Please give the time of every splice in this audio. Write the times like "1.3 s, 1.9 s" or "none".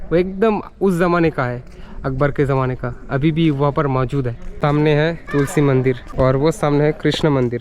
4.6 s